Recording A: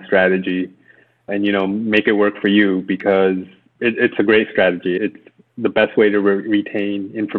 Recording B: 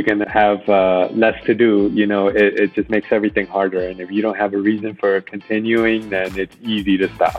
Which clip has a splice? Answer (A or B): A